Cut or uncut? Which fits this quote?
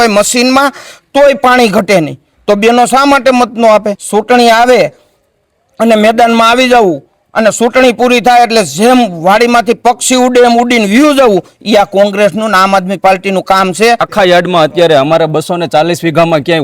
cut